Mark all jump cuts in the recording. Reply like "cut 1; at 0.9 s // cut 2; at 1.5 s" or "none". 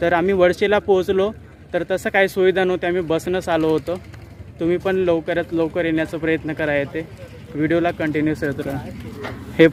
none

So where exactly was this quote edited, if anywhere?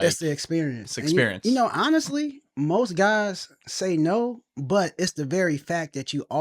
none

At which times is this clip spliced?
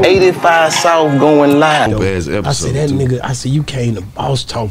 none

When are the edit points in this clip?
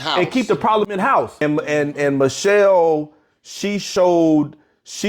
cut 1; at 1.0 s

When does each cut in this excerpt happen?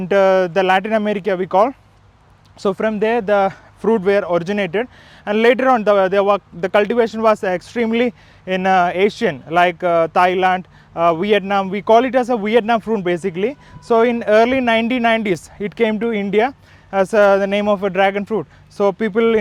none

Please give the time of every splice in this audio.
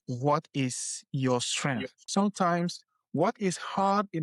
cut 1; at 2.1 s

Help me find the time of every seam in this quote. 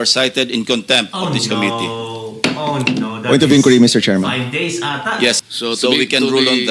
cut 1; at 5.4 s

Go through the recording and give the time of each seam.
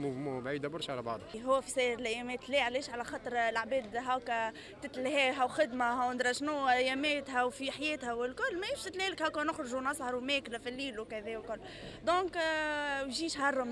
cut 1; at 1.3 s

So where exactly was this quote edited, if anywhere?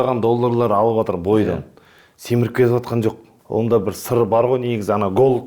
cut 1; at 3.3 s

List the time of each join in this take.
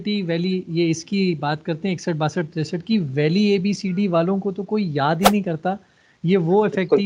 none

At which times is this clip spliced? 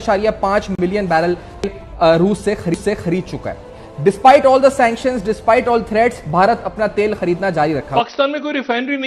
cut 1; at 7.9 s

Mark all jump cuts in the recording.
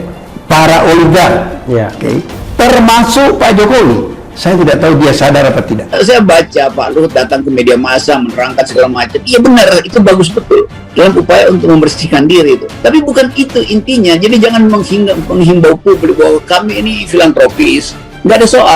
cut 1; at 5.8 s

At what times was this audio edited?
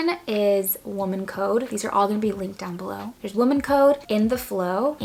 none

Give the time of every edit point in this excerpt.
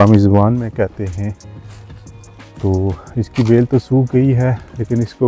none

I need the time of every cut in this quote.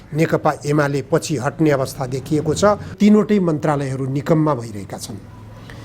cut 1; at 2.9 s

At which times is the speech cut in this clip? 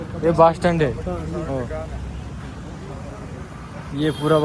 none

